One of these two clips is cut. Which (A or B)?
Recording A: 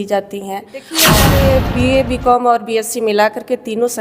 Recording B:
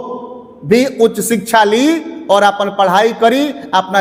A